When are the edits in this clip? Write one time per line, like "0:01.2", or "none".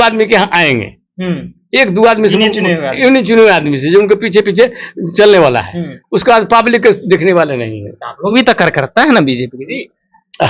none